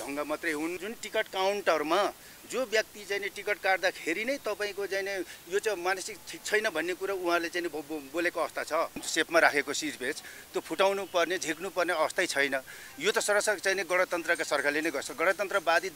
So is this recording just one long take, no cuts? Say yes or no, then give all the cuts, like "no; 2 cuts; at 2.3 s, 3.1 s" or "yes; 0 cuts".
no; 2 cuts; at 0.9 s, 9.0 s